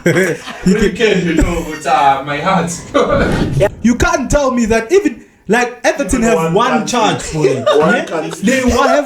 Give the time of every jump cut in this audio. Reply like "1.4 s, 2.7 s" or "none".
3.7 s

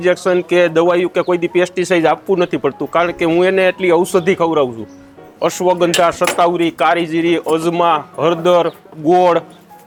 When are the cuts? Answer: none

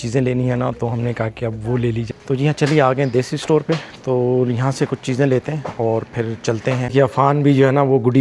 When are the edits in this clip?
2.0 s, 6.9 s

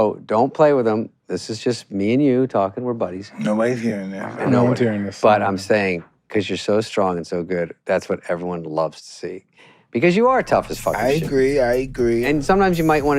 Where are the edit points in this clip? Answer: 12.2 s

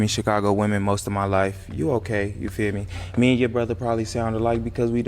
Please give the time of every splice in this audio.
3.8 s

